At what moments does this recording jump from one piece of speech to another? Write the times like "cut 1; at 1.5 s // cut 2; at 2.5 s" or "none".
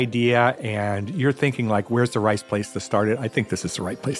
none